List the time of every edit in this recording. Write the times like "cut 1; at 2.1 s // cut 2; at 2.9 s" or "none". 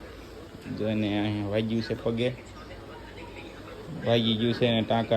cut 1; at 3.8 s

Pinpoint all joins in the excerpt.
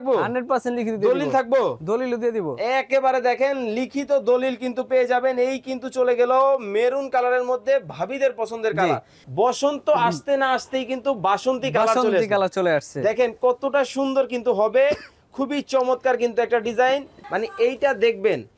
cut 1; at 9.2 s // cut 2; at 17.2 s

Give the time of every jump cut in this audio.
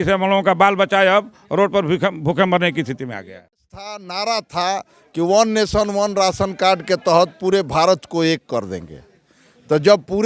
cut 1; at 4.0 s

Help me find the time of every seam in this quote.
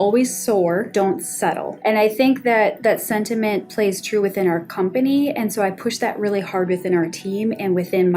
cut 1; at 1.2 s

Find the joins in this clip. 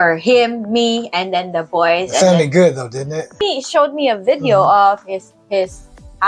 cut 1; at 3.4 s

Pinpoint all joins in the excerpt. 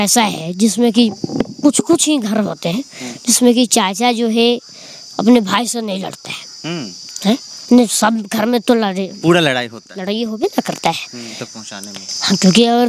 cut 1; at 11.5 s

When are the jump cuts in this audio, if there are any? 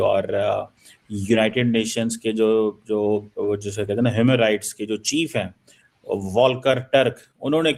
none

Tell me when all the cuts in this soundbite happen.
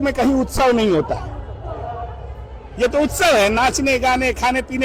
none

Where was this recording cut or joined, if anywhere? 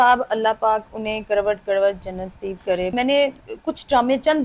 cut 1; at 2.9 s

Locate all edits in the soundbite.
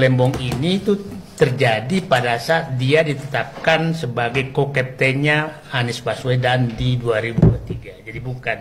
none

